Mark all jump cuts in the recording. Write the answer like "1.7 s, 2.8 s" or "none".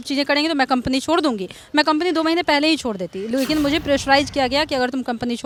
none

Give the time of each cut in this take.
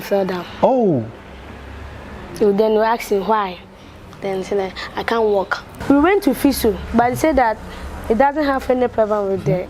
5.7 s

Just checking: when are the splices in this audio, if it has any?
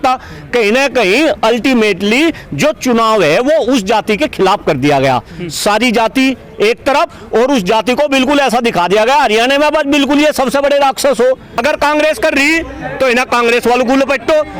11.5 s

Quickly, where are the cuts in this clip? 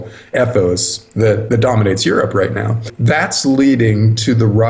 2.9 s

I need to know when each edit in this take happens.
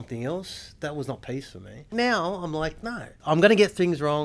1.9 s, 3.1 s

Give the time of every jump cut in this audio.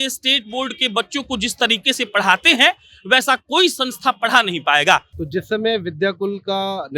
5.2 s

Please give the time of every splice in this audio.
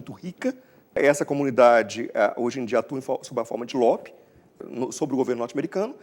1.0 s, 4.5 s

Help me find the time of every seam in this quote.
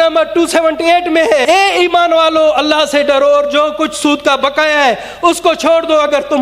1.4 s

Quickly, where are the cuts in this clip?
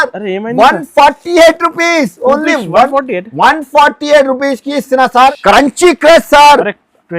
5.2 s

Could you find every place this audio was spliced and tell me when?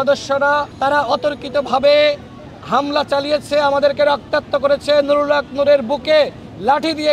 none

